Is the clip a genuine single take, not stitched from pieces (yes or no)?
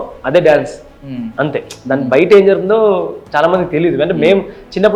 yes